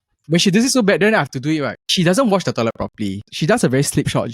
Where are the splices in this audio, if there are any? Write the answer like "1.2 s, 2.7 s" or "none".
1.8 s, 3.2 s